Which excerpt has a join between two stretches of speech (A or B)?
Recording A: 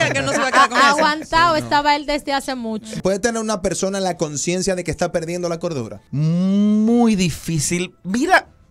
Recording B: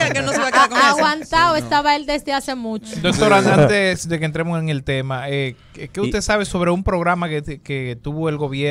A